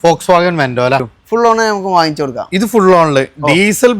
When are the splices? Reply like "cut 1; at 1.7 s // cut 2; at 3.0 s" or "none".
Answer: cut 1; at 1.0 s